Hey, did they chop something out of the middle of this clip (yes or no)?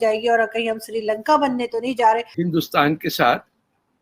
no